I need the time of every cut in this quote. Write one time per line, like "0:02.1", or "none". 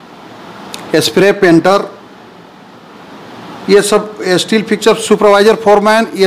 none